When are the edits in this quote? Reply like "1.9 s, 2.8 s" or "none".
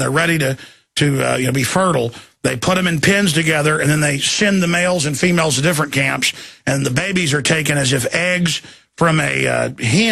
none